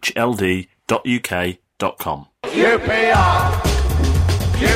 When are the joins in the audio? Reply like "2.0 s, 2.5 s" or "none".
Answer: 2.3 s